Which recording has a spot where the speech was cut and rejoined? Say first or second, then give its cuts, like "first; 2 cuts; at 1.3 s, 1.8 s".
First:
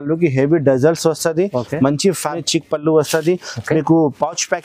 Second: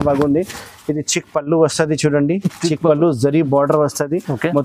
first; 1 cut; at 2.4 s